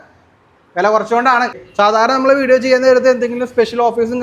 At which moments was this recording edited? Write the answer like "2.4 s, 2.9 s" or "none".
1.7 s